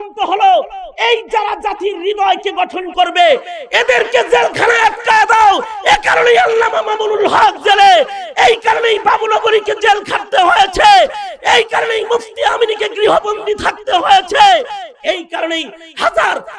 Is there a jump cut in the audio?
no; 0 cuts

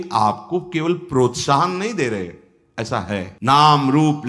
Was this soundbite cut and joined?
yes; 1 cut; at 3.3 s

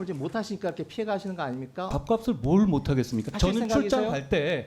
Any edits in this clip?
yes; 2 cuts; at 1.9 s, 3.3 s

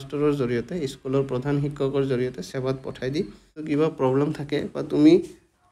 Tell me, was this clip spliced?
yes; 1 cut; at 3.5 s

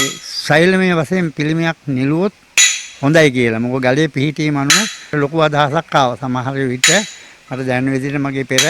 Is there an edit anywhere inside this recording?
yes; 1 cut; at 5.0 s

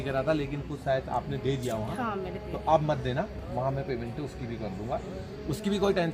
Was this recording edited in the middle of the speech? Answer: no; 0 cuts

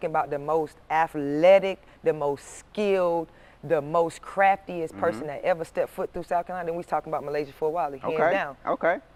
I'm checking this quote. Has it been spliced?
no; 0 cuts

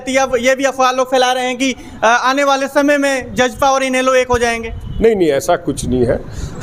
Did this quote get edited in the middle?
no; 0 cuts

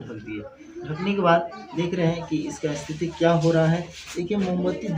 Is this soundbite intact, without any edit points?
yes; 0 cuts

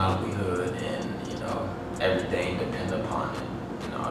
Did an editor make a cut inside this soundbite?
no; 0 cuts

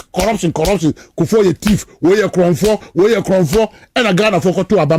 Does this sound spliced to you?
no; 0 cuts

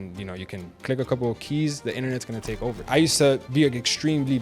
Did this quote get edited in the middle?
yes; 3 cuts; at 0.8 s, 2.8 s, 3.5 s

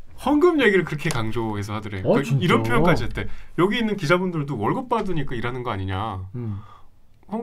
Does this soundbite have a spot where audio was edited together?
no; 0 cuts

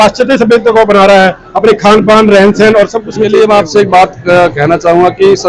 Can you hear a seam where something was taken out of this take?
yes; 1 cut; at 3.3 s

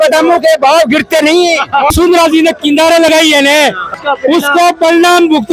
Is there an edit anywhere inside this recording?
yes; 2 cuts; at 1.9 s, 3.8 s

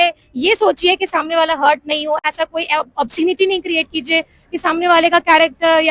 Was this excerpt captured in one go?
yes; 0 cuts

